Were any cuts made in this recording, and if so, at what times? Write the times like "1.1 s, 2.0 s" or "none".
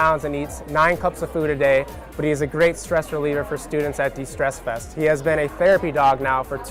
none

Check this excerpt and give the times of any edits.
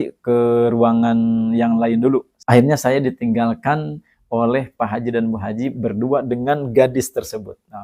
none

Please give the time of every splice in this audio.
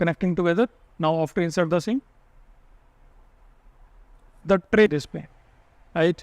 4.9 s

